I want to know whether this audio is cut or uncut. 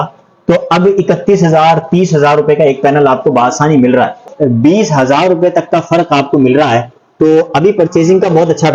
cut